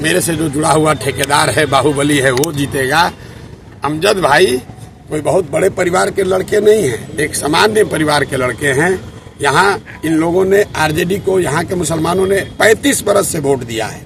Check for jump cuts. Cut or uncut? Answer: uncut